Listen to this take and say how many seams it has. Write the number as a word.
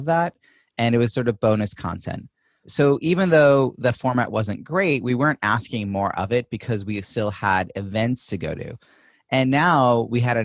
one